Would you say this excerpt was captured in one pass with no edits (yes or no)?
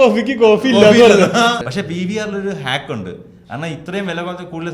no